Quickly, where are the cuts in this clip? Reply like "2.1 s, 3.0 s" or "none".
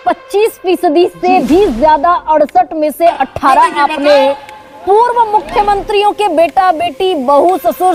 none